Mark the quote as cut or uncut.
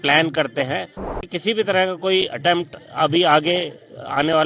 cut